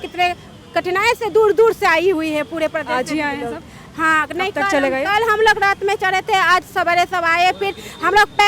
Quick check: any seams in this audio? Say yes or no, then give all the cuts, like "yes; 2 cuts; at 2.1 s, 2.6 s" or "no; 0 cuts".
no; 0 cuts